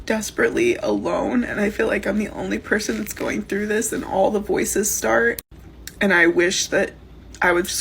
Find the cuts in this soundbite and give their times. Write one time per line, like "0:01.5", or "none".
none